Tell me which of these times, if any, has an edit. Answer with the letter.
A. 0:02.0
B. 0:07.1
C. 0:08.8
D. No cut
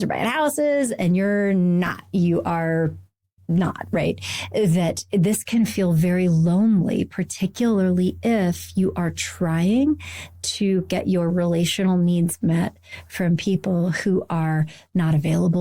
D